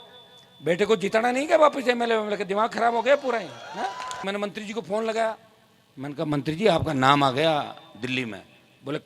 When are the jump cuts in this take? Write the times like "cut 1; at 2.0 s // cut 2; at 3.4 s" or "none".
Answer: cut 1; at 4.1 s

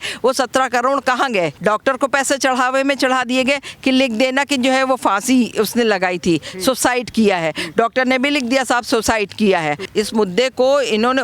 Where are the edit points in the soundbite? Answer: cut 1; at 1.5 s // cut 2; at 9.9 s

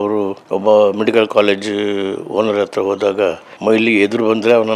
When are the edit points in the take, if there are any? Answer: none

